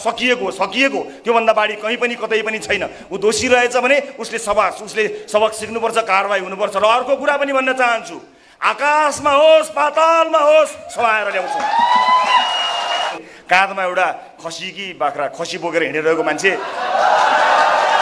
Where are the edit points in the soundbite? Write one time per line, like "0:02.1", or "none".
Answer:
0:13.1